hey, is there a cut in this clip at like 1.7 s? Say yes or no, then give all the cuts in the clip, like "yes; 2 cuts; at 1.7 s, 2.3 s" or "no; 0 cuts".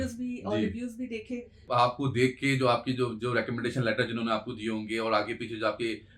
yes; 1 cut; at 1.7 s